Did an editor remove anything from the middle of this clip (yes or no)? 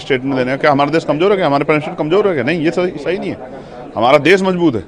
no